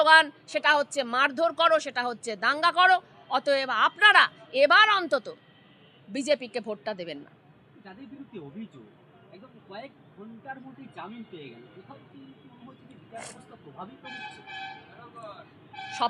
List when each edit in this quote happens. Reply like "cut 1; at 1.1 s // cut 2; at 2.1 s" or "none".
none